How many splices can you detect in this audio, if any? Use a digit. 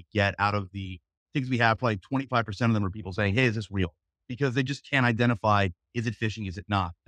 1